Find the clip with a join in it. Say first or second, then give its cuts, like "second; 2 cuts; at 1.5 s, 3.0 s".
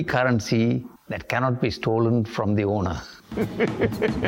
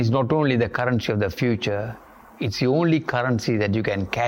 first; 1 cut; at 3.2 s